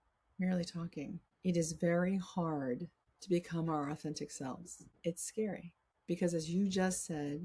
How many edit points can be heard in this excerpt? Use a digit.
1